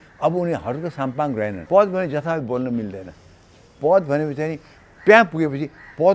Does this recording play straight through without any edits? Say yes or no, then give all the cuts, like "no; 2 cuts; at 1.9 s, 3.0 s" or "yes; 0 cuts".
no; 1 cut; at 1.6 s